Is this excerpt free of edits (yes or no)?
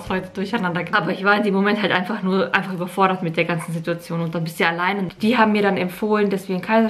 no